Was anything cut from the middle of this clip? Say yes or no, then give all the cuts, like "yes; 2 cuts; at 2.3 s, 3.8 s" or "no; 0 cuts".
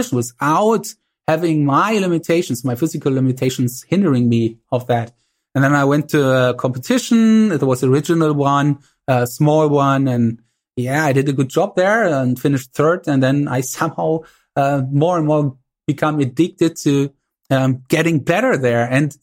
no; 0 cuts